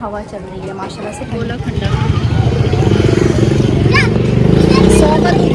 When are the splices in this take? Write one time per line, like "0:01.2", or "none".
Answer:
0:01.5